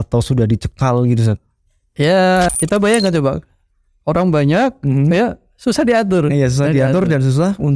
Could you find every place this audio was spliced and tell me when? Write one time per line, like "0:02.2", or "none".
0:02.5